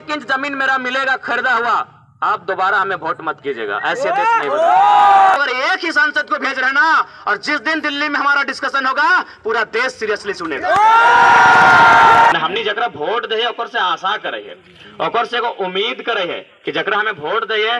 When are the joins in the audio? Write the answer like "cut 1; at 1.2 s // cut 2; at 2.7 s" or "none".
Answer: cut 1; at 5.3 s // cut 2; at 12.3 s